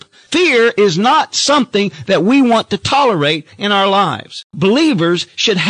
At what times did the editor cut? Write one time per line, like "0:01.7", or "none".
0:04.4